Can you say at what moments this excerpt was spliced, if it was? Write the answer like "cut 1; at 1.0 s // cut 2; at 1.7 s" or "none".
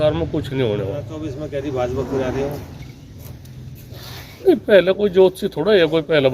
cut 1; at 1.2 s